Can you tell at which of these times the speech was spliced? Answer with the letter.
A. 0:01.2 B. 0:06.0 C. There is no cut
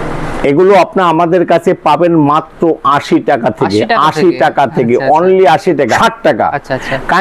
B